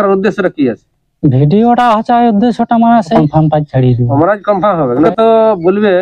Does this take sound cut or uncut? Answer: cut